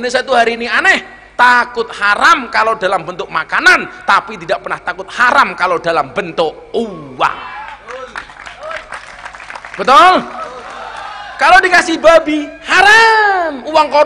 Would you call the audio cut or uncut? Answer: uncut